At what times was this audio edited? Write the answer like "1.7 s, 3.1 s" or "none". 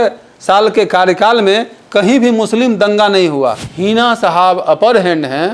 3.7 s

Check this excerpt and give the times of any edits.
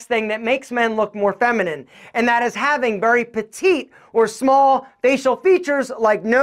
none

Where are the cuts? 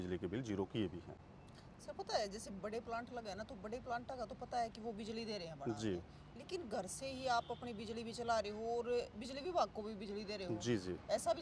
none

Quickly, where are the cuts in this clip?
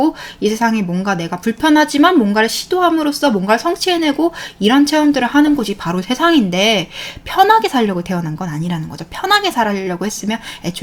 none

